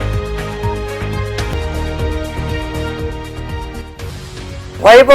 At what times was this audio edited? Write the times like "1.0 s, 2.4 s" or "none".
1.4 s